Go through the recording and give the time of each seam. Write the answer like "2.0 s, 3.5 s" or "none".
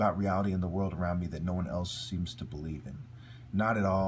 0.9 s